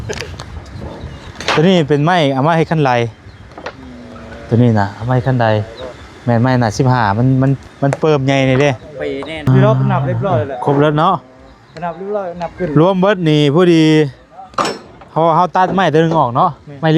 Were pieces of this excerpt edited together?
yes; 1 cut; at 9.5 s

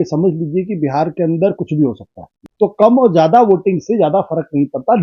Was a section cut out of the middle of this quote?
yes; 1 cut; at 2.4 s

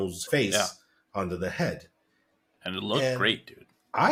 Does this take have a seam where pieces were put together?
no; 0 cuts

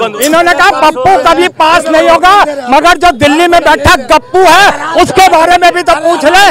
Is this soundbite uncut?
yes; 0 cuts

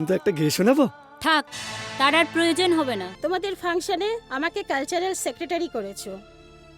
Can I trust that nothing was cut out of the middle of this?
no; 1 cut; at 3.1 s

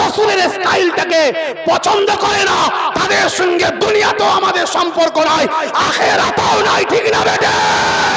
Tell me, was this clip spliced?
no; 0 cuts

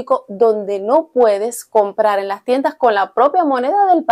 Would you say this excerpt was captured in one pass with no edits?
yes; 0 cuts

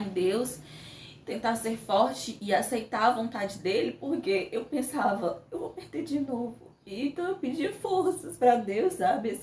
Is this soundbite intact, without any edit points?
yes; 0 cuts

